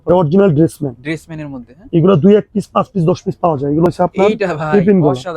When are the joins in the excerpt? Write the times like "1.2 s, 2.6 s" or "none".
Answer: 3.9 s